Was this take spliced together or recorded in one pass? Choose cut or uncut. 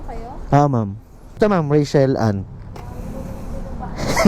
cut